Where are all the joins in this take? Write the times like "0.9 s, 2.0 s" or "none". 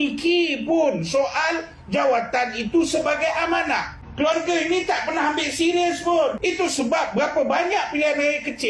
4.0 s, 6.4 s